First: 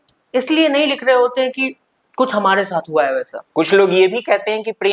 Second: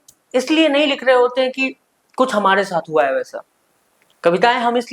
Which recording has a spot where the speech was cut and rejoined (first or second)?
first